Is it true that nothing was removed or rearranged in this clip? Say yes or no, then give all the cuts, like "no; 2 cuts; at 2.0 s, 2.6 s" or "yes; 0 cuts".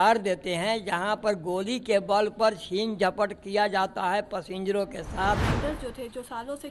no; 1 cut; at 5.5 s